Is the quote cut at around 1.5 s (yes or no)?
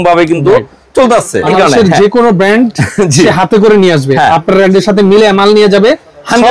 yes